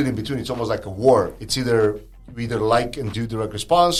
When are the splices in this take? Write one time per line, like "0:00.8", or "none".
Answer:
none